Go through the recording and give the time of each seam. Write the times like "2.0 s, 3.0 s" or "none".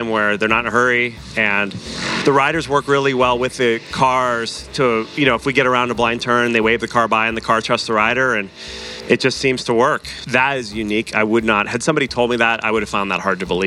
2.2 s, 10.1 s